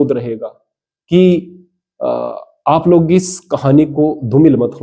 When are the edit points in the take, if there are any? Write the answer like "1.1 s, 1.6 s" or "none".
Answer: none